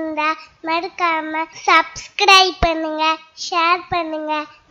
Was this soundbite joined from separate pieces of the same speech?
yes; 1 cut; at 1.5 s

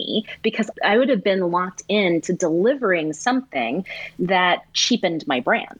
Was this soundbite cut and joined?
no; 0 cuts

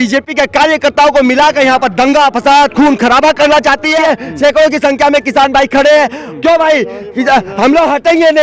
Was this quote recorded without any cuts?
no; 1 cut; at 4.0 s

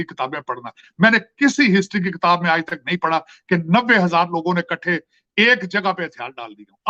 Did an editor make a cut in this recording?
no; 0 cuts

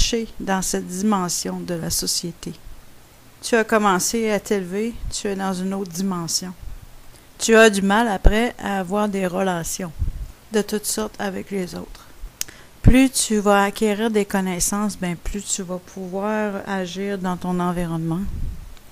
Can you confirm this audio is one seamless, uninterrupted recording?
no; 1 cut; at 2.2 s

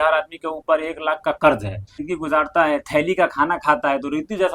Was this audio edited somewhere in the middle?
yes; 1 cut; at 2.0 s

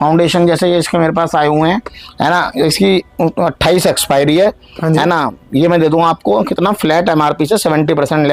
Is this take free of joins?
yes; 0 cuts

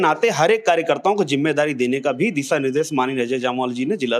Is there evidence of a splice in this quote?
no; 0 cuts

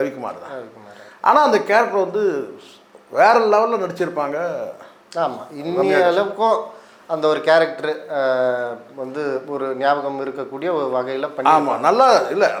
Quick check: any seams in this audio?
no; 0 cuts

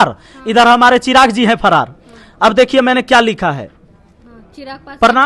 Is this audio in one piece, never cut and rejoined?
yes; 0 cuts

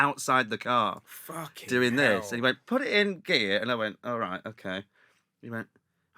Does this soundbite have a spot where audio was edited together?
no; 0 cuts

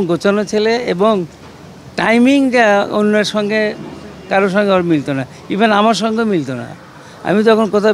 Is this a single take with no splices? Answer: yes; 0 cuts

